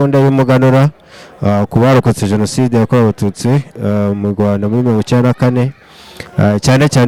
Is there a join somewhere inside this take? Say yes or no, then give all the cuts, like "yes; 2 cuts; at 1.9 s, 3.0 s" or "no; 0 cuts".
no; 0 cuts